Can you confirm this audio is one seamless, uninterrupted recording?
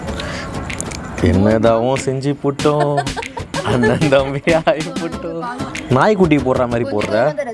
no; 1 cut; at 5.7 s

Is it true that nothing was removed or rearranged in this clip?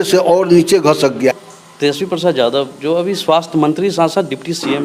no; 1 cut; at 1.3 s

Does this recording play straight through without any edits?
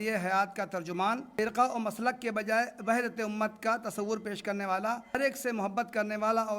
no; 2 cuts; at 1.3 s, 5.2 s

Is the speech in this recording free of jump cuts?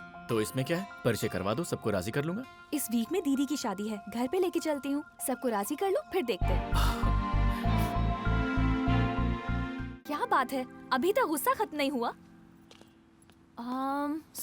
no; 1 cut; at 9.7 s

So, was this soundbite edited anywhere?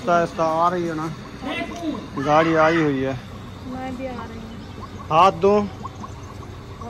no; 0 cuts

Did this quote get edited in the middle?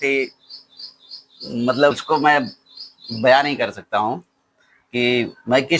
yes; 1 cut; at 1.9 s

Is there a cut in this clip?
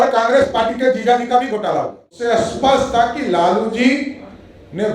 yes; 1 cut; at 2.1 s

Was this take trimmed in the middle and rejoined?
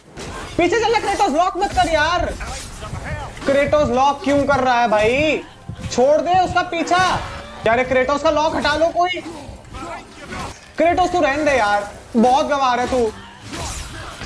yes; 2 cuts; at 7.7 s, 10.6 s

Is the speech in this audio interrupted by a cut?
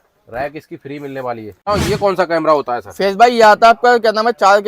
yes; 1 cut; at 1.7 s

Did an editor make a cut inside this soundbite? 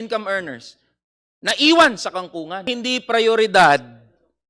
yes; 1 cut; at 2.7 s

